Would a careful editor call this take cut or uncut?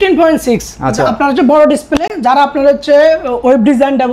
uncut